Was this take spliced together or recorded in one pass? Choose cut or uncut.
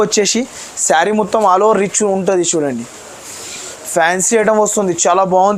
uncut